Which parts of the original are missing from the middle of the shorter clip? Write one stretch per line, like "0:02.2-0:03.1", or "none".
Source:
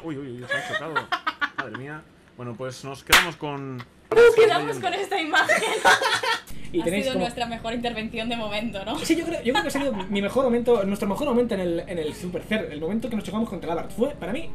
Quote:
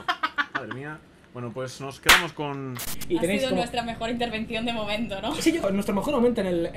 0:03.9-0:06.5
0:09.3-0:10.8